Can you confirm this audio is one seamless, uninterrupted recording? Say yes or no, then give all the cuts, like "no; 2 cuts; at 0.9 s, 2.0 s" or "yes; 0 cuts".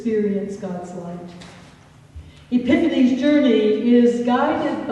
no; 1 cut; at 3.4 s